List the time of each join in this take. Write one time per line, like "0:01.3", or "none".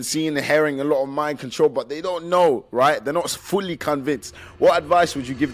none